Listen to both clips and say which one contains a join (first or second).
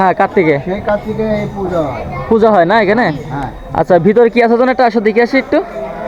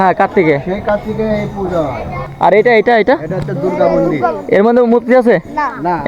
second